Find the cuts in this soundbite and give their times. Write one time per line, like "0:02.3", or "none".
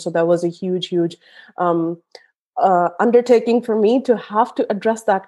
none